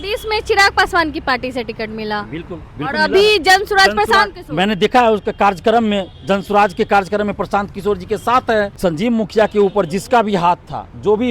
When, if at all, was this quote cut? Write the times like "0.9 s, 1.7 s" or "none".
8.7 s